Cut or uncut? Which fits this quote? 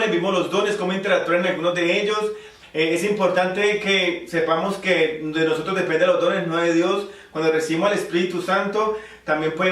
cut